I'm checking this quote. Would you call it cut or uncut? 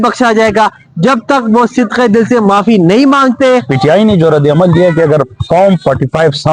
cut